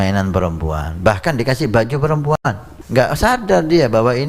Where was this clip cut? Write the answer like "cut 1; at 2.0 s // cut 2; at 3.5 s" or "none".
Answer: cut 1; at 2.7 s